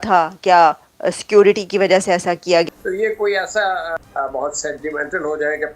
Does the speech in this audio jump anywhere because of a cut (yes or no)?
yes